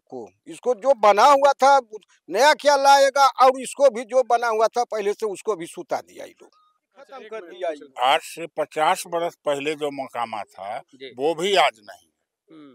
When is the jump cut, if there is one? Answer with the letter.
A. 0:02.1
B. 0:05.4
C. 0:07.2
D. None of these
C